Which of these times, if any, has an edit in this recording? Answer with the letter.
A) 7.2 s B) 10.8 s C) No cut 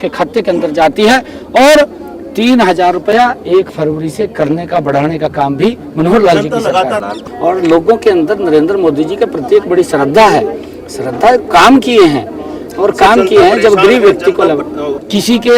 A